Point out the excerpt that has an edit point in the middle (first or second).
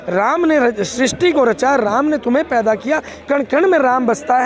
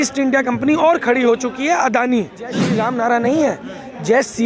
second